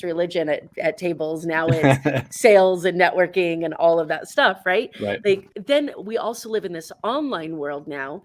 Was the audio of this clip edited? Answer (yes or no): yes